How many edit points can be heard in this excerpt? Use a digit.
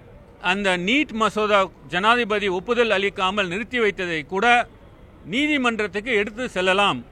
0